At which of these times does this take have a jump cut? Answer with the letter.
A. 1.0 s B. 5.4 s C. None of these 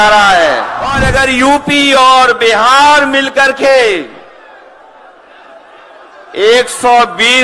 A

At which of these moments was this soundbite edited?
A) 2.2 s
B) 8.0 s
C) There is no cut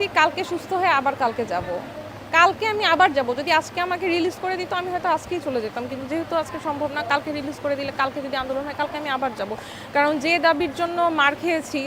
C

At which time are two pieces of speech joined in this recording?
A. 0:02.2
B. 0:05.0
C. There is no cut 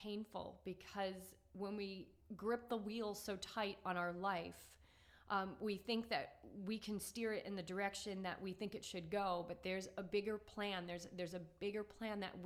C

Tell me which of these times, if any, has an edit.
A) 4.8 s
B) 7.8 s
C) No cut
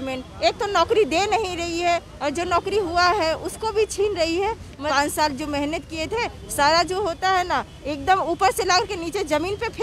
A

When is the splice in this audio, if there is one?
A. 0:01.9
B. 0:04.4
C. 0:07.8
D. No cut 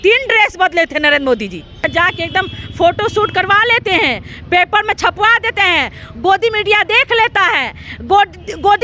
A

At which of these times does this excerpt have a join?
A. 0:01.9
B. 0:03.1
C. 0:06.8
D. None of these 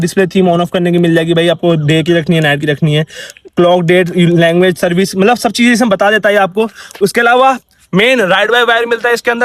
D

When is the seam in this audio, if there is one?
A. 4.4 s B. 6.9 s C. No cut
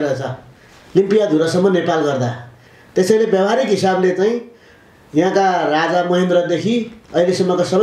C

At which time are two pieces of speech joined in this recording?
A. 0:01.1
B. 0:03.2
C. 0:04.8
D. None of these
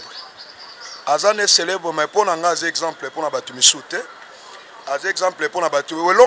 D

